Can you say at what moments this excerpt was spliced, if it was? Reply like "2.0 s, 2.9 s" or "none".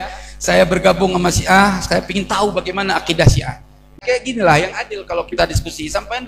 4.0 s